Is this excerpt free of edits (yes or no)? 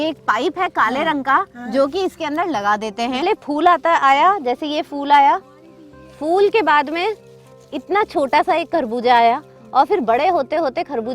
no